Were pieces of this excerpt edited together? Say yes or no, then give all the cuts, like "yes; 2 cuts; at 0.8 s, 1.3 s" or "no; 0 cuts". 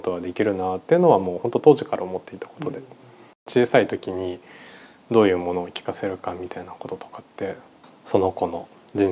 yes; 2 cuts; at 3.5 s, 7.9 s